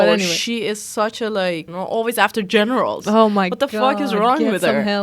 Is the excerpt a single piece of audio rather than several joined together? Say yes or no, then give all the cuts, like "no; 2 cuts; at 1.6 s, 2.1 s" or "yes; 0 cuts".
no; 1 cut; at 1.7 s